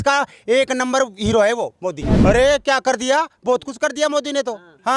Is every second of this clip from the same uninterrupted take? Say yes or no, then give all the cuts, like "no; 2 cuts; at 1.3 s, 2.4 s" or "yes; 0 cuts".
no; 1 cut; at 2.1 s